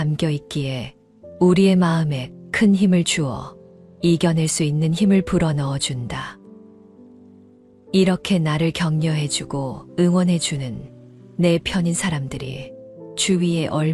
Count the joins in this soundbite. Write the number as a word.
zero